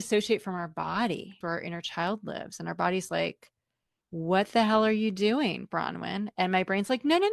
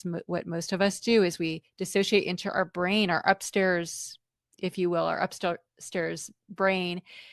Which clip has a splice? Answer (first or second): first